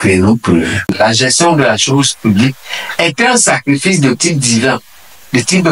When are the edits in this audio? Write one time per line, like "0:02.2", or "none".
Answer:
0:00.9